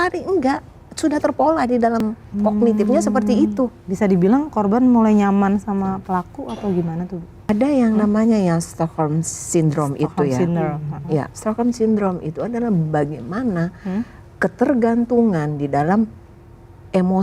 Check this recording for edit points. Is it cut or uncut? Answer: cut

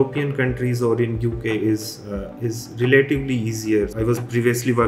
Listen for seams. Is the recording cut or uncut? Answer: cut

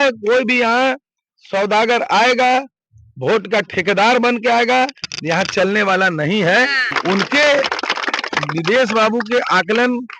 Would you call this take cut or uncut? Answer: cut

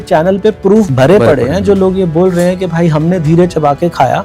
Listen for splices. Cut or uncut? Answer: cut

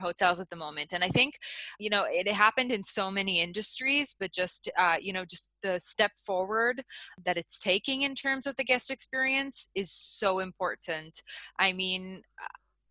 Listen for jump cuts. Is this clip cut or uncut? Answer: cut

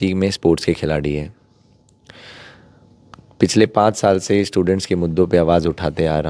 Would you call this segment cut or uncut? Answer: uncut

